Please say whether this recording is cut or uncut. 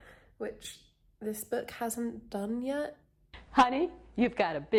uncut